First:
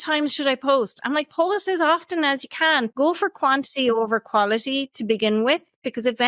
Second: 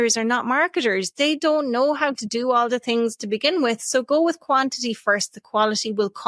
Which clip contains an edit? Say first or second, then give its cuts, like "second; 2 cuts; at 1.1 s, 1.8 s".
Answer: first; 1 cut; at 2.9 s